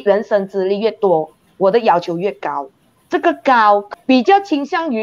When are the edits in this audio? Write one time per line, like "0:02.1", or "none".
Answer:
0:03.9